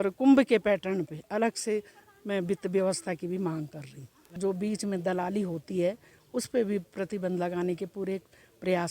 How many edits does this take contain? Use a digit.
1